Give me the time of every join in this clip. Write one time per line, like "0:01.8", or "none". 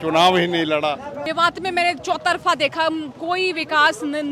0:01.2